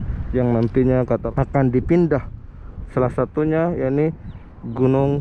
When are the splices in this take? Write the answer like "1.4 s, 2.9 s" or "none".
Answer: 1.2 s